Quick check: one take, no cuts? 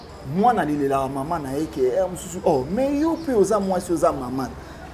yes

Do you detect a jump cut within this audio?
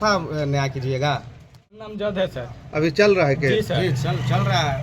yes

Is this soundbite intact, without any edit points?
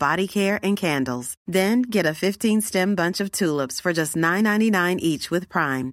yes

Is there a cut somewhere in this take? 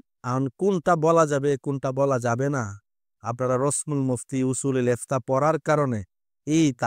no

